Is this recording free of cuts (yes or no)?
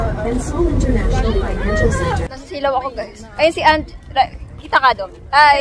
no